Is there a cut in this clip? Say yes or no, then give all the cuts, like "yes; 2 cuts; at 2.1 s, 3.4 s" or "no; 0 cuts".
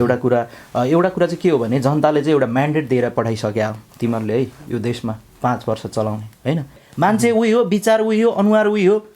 yes; 1 cut; at 6.8 s